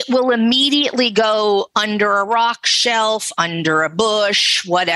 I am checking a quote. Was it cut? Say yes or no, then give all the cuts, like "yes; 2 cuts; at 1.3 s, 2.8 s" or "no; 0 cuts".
no; 0 cuts